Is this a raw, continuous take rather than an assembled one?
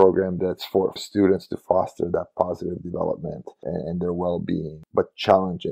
no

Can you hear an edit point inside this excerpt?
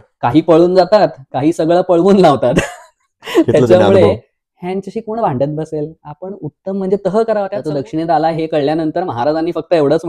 yes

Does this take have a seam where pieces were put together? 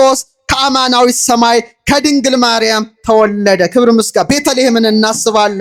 no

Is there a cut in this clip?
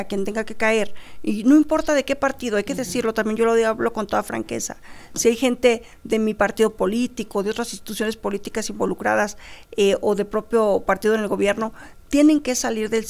no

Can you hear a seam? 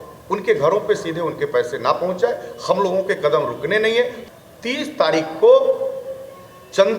yes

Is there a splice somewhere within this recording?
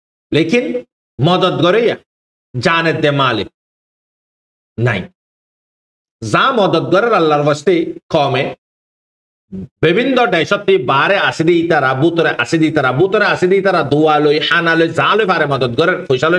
no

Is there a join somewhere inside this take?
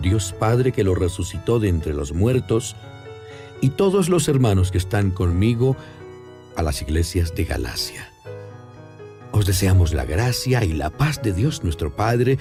no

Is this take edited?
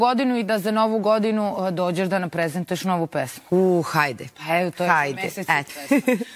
no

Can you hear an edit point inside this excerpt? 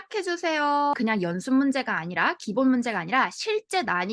yes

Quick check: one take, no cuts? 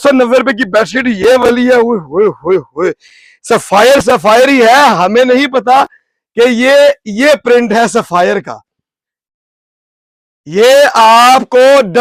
yes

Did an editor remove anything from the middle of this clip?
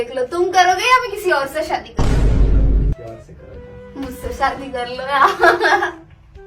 no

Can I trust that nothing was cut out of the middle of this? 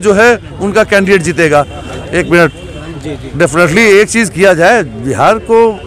yes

